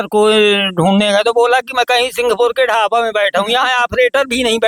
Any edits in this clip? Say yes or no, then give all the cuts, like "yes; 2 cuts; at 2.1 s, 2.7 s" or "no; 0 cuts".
no; 0 cuts